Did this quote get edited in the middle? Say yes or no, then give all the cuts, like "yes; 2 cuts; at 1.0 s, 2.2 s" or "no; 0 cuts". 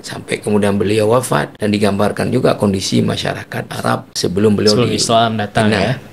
yes; 2 cuts; at 1.5 s, 4.1 s